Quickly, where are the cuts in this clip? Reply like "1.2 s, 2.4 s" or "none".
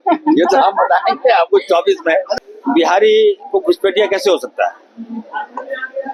2.3 s